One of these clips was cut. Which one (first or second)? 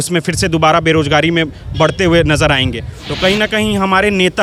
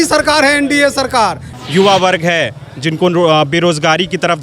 second